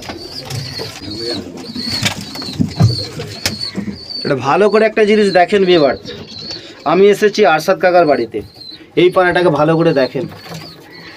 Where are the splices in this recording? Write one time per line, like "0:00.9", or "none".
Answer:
0:01.0